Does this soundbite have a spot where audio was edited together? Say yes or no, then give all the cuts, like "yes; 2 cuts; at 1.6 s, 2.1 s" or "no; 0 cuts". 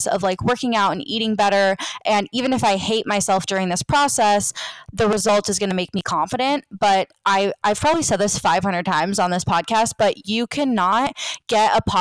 no; 0 cuts